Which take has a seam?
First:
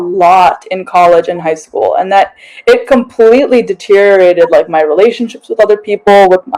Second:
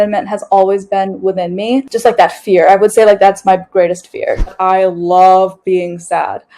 second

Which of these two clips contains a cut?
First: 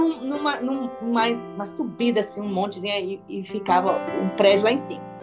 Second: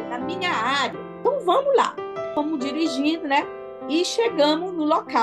second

